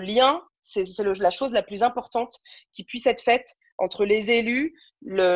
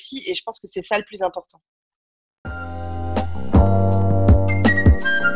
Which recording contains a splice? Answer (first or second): second